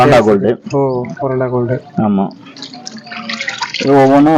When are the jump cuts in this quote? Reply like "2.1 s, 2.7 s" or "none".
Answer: none